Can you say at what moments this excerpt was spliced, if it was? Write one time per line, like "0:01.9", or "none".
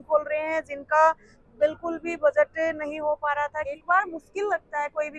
0:03.8